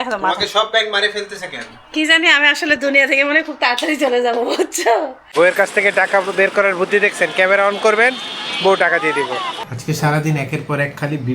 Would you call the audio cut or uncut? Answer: cut